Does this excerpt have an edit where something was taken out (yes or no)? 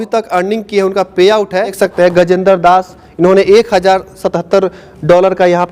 yes